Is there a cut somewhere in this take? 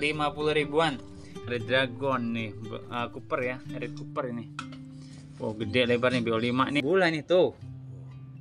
yes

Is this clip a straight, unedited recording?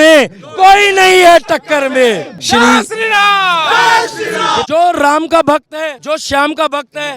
no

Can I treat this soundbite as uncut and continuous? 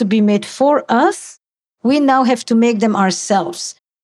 yes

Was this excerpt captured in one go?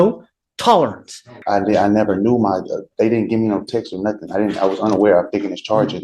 no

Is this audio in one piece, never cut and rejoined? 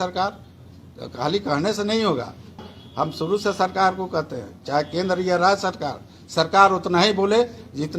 no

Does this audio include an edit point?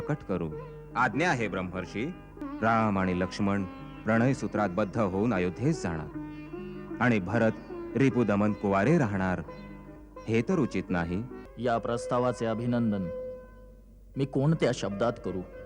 yes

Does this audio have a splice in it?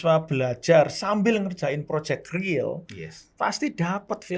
no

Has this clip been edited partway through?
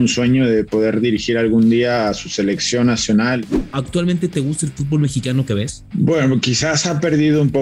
yes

